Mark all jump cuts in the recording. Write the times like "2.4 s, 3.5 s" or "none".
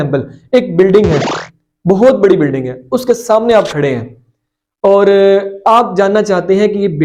none